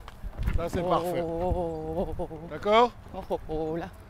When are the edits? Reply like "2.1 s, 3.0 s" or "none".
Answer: 2.4 s